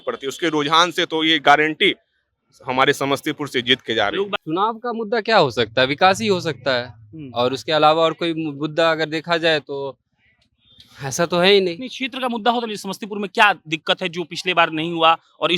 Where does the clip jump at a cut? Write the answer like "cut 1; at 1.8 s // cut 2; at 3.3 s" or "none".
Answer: cut 1; at 4.4 s